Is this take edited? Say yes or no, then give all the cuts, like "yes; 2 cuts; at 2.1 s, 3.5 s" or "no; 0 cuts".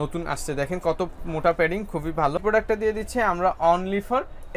no; 0 cuts